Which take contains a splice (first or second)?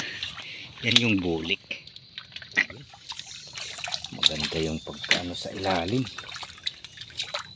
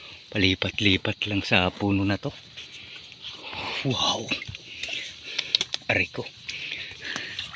first